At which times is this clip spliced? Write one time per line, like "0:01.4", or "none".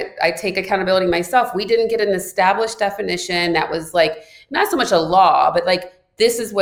none